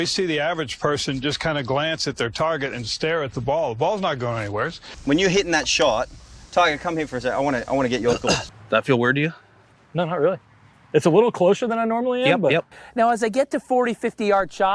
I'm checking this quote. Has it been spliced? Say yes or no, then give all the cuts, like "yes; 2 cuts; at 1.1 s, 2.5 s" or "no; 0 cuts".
yes; 3 cuts; at 4.9 s, 8.5 s, 12.8 s